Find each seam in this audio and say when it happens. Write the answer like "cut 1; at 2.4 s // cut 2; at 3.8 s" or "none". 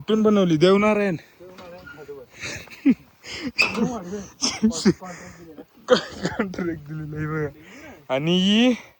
none